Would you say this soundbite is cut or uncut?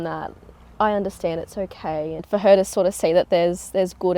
cut